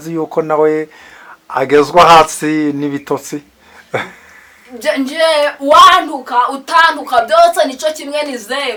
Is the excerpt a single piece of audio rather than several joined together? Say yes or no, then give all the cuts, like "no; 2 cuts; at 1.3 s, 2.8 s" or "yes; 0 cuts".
yes; 0 cuts